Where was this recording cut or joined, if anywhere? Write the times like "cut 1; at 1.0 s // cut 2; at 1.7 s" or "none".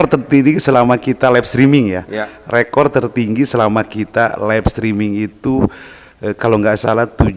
none

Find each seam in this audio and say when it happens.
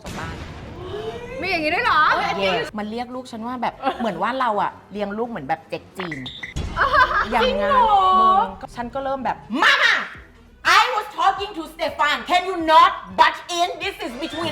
cut 1; at 2.7 s // cut 2; at 3.8 s // cut 3; at 8.6 s

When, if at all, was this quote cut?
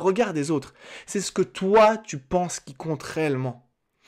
none

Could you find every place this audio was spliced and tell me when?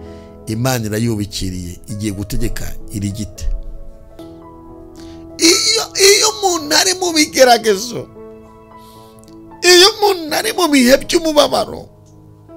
cut 1; at 4.2 s

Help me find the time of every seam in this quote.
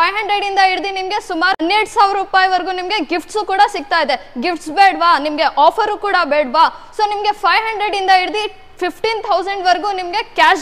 cut 1; at 1.6 s

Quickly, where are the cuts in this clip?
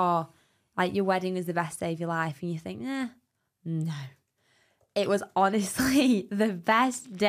none

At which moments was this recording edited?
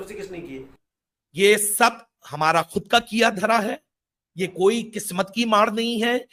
none

